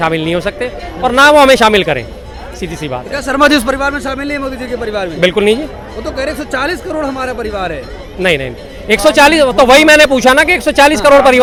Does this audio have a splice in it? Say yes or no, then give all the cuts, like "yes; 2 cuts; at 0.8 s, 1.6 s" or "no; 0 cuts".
no; 0 cuts